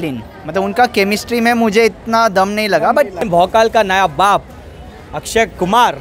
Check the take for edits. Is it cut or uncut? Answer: cut